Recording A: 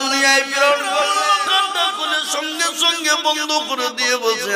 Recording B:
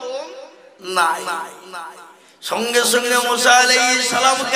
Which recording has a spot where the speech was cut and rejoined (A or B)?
A